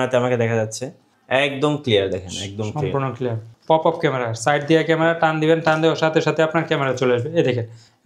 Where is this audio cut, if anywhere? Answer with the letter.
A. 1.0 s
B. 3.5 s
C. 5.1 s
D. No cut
B